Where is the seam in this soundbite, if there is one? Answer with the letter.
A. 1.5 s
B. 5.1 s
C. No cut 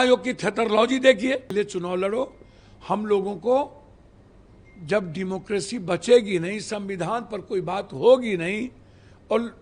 A